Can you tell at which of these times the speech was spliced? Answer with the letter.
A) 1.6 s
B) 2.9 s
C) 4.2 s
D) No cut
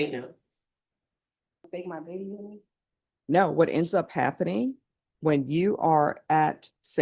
A